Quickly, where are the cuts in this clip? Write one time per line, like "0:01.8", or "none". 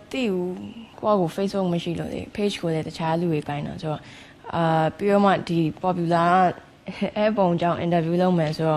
0:00.9

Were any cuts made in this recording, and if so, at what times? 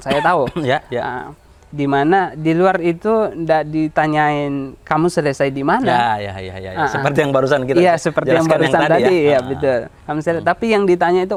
none

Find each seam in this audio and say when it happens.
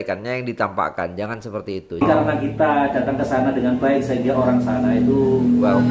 0:02.0

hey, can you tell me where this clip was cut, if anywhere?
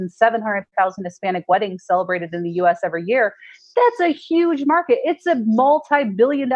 none

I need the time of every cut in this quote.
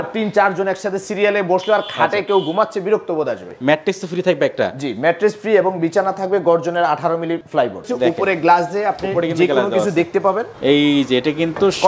0:03.5
0:07.7
0:10.5

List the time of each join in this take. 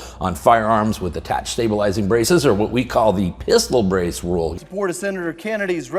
none

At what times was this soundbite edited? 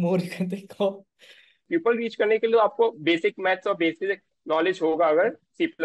0:01.6

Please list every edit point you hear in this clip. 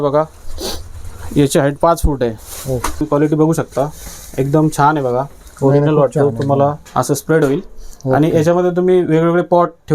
0:03.0
0:06.8

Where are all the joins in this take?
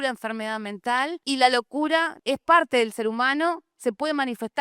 0:01.2
0:02.1

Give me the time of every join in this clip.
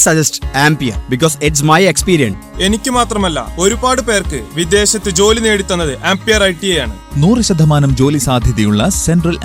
0:02.4

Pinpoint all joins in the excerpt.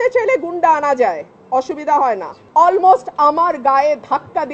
0:02.3

